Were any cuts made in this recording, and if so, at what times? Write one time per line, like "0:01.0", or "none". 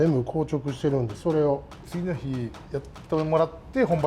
0:01.9
0:02.6